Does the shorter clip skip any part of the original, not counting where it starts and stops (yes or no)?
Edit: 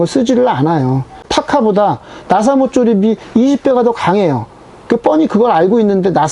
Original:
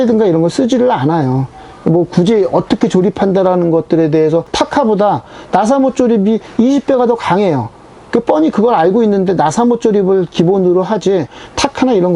yes